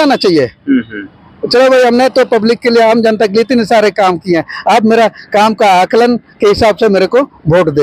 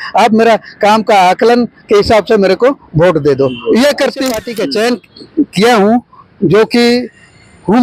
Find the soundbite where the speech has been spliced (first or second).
second